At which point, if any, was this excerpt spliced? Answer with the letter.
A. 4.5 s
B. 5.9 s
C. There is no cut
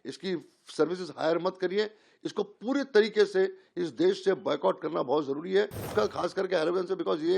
B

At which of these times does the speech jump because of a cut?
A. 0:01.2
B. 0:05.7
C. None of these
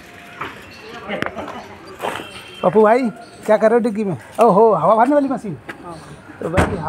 A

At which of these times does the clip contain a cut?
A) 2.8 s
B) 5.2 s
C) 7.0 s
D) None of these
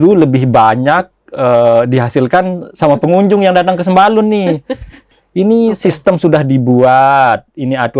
B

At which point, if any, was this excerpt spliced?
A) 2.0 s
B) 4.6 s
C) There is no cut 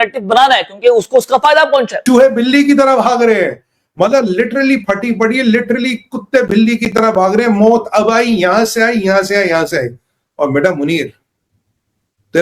A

